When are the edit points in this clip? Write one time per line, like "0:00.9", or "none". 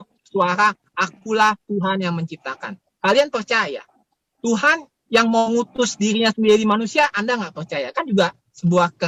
none